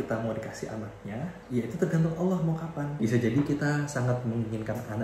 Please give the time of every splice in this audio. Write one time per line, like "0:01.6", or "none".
0:01.4
0:02.9